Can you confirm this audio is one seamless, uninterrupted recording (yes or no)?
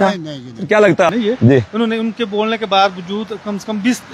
no